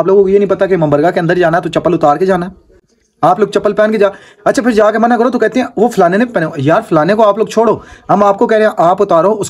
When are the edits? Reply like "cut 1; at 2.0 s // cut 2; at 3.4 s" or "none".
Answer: none

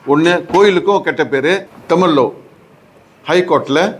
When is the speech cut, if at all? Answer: cut 1; at 1.7 s

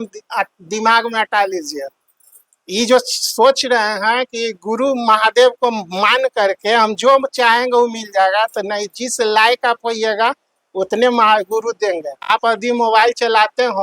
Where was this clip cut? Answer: cut 1; at 12.4 s

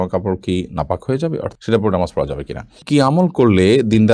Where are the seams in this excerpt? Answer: cut 1; at 1.6 s // cut 2; at 2.8 s

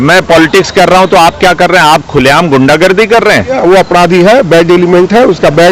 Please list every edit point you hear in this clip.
cut 1; at 3.5 s

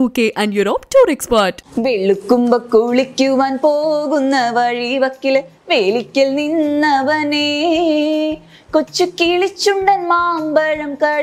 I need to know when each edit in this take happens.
cut 1; at 1.7 s

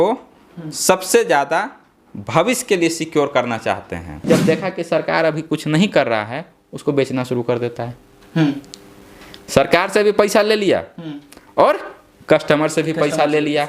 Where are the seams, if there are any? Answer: cut 1; at 4.1 s

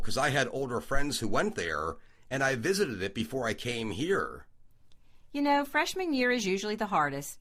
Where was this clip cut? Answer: none

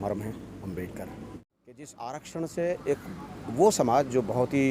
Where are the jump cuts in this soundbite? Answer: cut 1; at 1.9 s

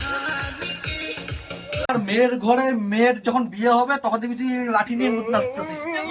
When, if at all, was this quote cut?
cut 1; at 1.9 s

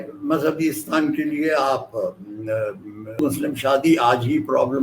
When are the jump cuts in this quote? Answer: cut 1; at 3.2 s

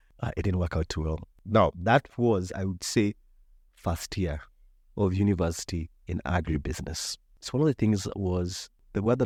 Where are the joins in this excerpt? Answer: none

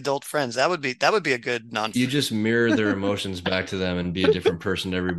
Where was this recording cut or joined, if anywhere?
cut 1; at 1.9 s

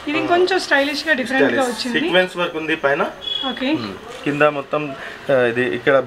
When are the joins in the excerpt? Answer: none

